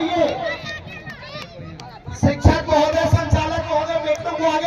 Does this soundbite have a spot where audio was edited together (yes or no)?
no